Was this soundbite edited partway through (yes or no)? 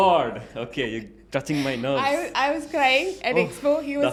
no